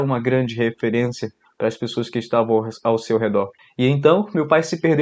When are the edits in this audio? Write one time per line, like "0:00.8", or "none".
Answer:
0:03.6